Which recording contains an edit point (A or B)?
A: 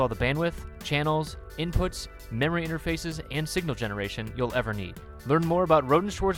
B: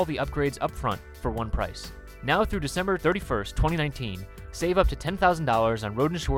B